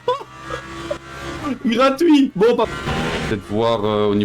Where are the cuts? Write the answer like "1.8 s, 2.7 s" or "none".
2.7 s